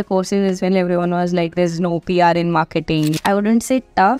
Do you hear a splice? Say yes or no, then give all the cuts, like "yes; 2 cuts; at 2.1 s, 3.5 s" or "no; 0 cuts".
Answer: yes; 1 cut; at 3.2 s